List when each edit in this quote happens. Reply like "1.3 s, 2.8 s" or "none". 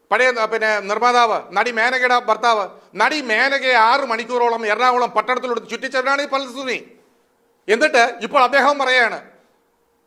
none